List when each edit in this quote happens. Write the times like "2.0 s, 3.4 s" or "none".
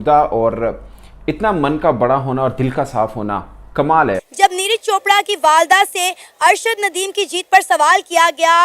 4.2 s